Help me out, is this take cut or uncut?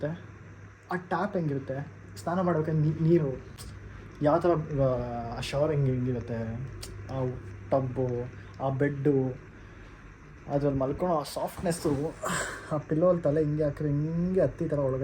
uncut